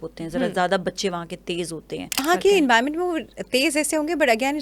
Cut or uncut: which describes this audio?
cut